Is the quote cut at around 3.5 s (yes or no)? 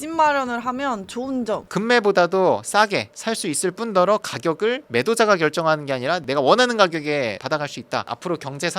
no